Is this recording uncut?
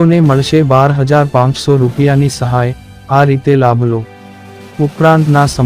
no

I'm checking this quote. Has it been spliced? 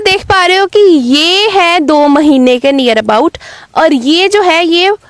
no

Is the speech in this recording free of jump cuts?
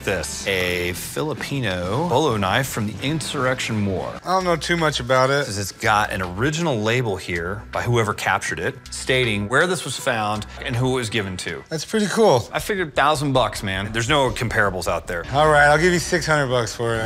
no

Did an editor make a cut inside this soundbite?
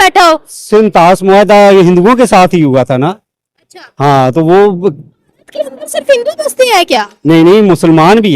no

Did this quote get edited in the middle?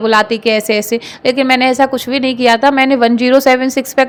no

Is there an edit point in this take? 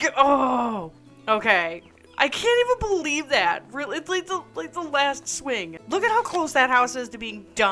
yes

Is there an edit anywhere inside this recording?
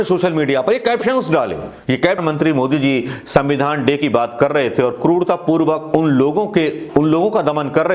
yes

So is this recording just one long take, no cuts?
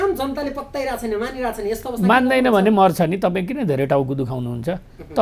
yes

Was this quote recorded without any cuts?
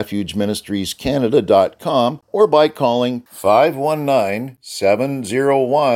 no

